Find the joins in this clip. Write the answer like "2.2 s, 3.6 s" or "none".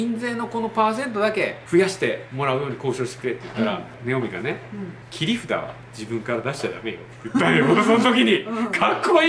1.6 s, 3.9 s, 5.0 s